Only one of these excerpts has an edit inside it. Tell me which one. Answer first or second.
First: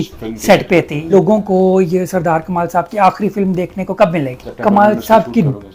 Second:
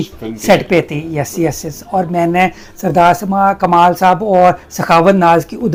first